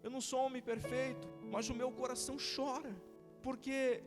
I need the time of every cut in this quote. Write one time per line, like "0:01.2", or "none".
0:01.3
0:02.7

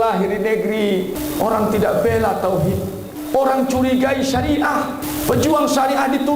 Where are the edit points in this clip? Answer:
0:01.2
0:03.1
0:05.0

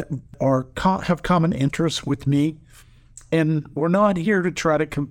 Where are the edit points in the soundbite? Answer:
none

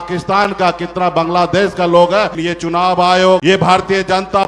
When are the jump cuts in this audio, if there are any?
0:02.4
0:03.4

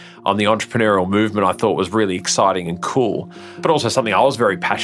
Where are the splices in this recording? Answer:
none

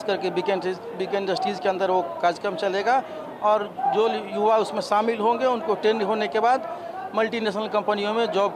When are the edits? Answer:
none

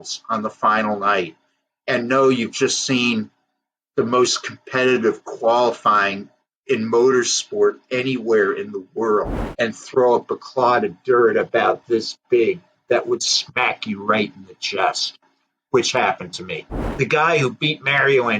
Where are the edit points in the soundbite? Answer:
0:09.4
0:16.8

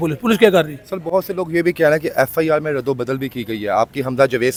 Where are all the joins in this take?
none

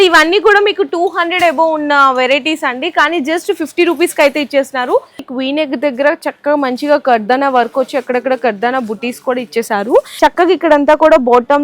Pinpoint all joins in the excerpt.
0:05.3
0:10.1

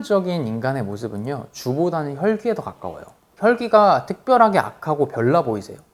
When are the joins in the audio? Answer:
none

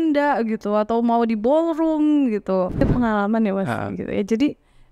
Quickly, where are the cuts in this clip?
0:02.8

